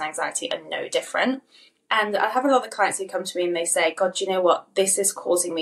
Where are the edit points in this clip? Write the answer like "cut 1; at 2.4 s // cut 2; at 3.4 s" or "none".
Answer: none